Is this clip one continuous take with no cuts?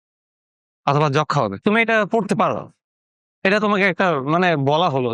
no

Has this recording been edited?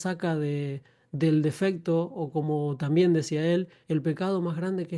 no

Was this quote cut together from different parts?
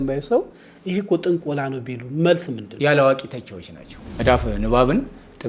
yes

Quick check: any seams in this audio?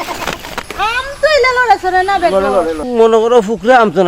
yes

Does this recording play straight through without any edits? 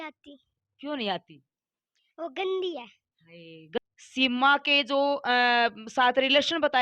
no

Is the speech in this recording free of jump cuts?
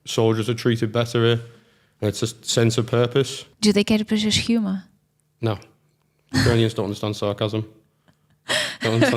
no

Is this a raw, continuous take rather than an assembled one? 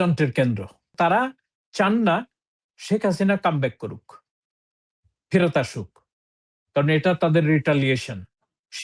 no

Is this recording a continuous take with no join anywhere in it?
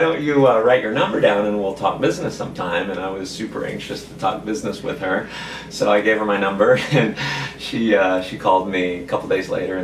yes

